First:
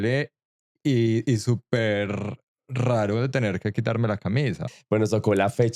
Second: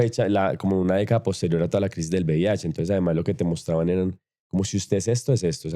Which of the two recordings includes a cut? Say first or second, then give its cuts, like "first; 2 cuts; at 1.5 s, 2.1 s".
first; 1 cut; at 4.7 s